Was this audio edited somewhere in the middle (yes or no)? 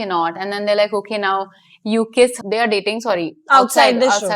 yes